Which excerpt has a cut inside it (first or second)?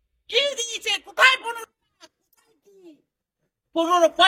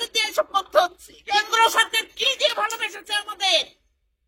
second